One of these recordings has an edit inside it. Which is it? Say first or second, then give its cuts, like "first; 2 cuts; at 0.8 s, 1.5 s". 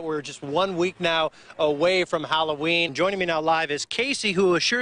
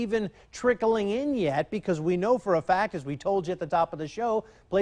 first; 1 cut; at 2.9 s